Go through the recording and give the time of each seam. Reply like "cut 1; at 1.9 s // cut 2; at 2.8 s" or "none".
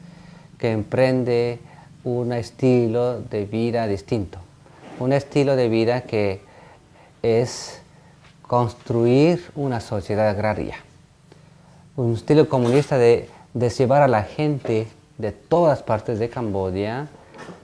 none